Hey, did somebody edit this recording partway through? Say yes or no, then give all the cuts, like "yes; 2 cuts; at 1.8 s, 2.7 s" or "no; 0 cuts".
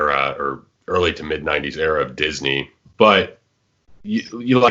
yes; 1 cut; at 2.8 s